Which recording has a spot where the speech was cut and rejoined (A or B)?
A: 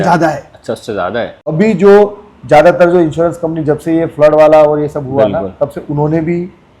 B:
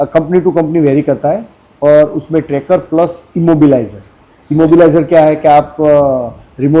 A